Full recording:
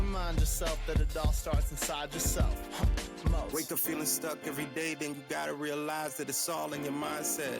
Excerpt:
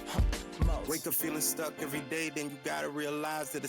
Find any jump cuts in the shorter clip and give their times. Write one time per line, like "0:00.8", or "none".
none